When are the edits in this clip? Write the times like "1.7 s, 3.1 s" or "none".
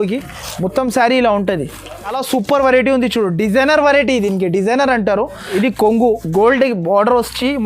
2.2 s, 5.5 s